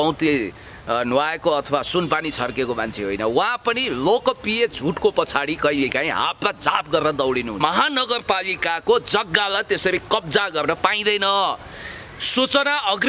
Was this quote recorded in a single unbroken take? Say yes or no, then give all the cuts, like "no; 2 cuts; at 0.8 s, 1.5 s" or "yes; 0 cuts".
no; 1 cut; at 7.6 s